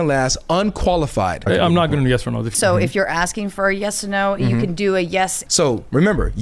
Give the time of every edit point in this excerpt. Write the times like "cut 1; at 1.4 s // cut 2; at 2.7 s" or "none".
cut 1; at 1.4 s // cut 2; at 2.5 s // cut 3; at 5.4 s